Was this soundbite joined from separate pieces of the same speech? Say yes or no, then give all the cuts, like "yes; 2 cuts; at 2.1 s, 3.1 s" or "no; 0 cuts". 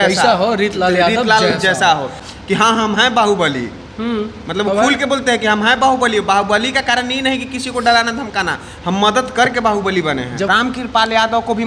yes; 2 cuts; at 2.3 s, 10.5 s